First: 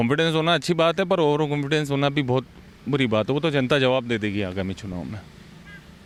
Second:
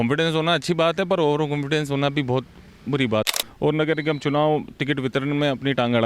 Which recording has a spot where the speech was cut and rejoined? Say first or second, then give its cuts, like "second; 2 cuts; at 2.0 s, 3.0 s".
second; 1 cut; at 3.3 s